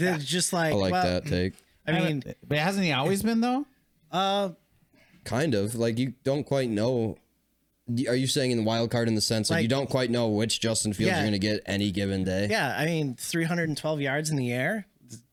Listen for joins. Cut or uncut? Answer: uncut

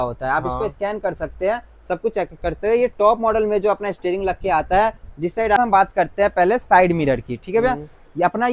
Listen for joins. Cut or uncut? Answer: cut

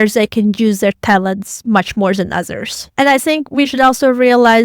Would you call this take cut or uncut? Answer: cut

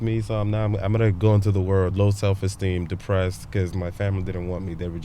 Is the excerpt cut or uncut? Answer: cut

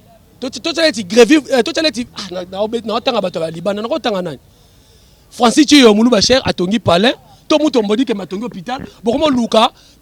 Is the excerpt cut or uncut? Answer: uncut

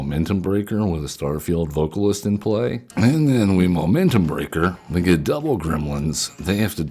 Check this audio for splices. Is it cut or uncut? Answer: cut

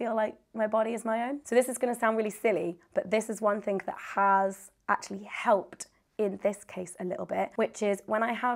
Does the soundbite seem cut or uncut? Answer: uncut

